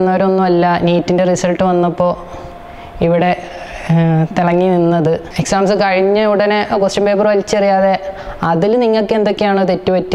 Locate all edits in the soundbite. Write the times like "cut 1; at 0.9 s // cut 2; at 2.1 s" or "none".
cut 1; at 5.3 s

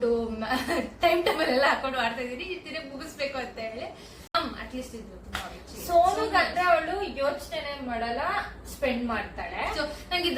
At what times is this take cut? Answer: cut 1; at 4.3 s

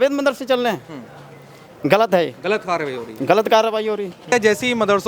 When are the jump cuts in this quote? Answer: none

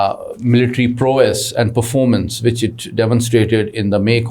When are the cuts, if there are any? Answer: none

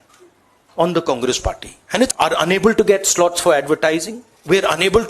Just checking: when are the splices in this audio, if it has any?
cut 1; at 2.1 s

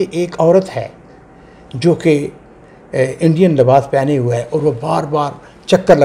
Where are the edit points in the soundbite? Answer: none

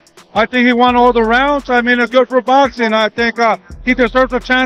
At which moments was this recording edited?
none

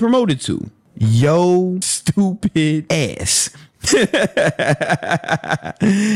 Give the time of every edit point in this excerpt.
cut 1; at 1.9 s // cut 2; at 2.8 s

